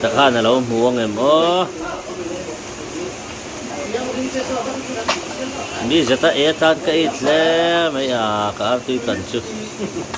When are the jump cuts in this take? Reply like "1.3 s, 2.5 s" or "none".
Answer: none